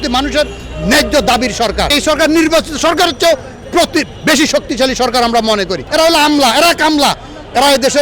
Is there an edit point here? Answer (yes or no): yes